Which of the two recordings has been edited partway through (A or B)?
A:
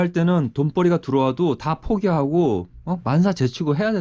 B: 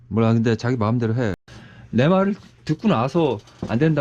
B